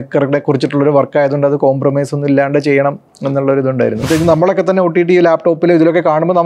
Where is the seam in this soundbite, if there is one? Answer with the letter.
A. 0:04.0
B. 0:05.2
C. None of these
A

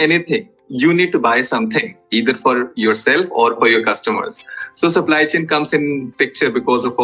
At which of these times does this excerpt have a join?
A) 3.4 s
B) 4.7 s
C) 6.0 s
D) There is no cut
D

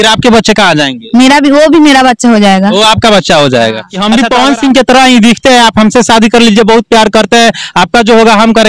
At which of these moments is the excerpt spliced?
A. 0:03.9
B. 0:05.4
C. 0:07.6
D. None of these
A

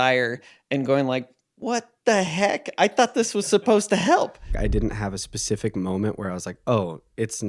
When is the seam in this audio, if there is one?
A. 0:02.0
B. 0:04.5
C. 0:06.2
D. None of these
B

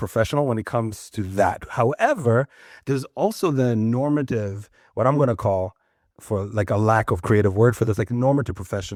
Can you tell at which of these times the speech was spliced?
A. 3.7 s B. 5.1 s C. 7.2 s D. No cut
D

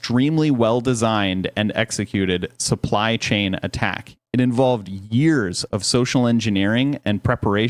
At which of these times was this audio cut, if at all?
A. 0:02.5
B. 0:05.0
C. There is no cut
C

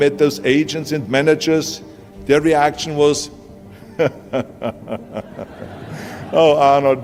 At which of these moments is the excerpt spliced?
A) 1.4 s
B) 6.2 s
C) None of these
C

